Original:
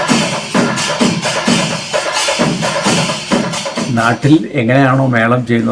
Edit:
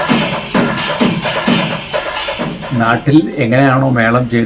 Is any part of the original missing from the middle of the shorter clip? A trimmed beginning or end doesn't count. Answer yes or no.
yes